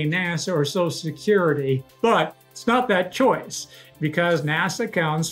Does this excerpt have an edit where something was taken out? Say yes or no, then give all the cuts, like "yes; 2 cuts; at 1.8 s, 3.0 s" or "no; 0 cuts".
yes; 1 cut; at 2.2 s